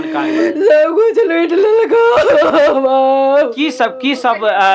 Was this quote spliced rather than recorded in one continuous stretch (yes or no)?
no